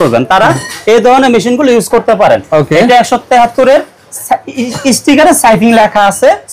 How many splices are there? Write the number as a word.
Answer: zero